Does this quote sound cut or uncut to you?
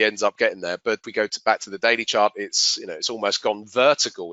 cut